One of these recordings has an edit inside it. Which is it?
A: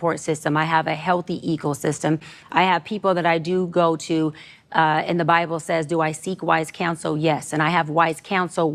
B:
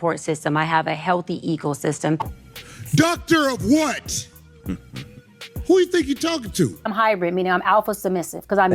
B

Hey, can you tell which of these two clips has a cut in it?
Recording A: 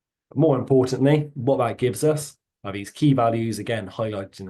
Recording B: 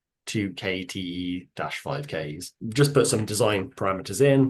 B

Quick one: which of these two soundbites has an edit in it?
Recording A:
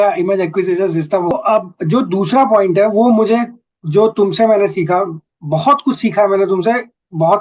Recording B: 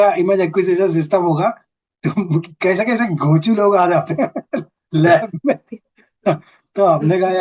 A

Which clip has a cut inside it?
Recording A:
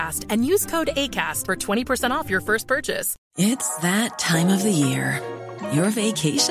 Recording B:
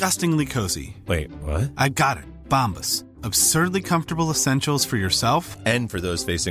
A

